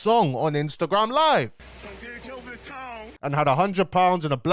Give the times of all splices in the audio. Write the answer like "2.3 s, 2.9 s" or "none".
1.5 s, 3.2 s